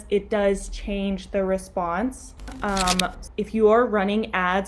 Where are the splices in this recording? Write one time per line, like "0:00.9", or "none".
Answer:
0:02.6